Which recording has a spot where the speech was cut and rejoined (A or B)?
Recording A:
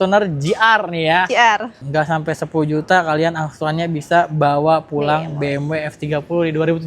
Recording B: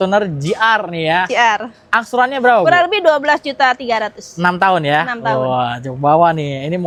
A